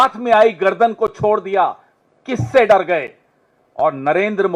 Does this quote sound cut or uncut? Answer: uncut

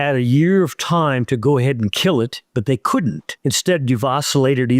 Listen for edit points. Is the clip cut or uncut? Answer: cut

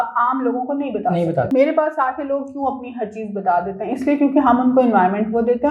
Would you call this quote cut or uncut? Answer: cut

